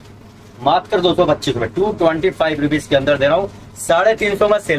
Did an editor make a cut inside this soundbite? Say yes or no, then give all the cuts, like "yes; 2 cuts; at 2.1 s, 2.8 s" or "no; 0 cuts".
no; 0 cuts